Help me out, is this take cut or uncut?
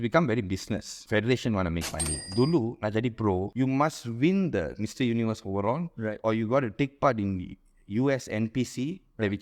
cut